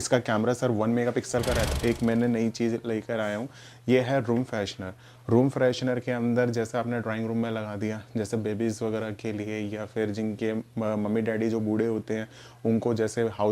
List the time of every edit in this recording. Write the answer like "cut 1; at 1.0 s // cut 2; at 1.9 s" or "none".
cut 1; at 1.7 s